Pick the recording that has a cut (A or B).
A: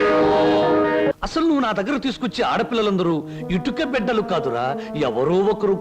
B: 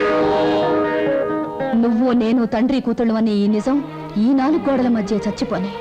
A